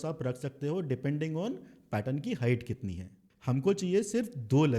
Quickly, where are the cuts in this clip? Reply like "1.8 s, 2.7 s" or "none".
3.2 s